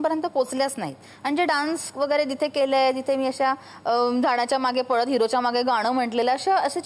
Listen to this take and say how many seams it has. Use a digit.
0